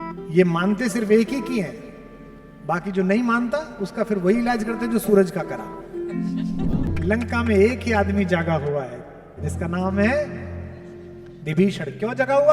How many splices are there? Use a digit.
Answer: 1